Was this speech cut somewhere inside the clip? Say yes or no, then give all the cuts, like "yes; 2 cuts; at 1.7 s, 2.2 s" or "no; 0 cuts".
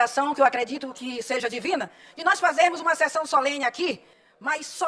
no; 0 cuts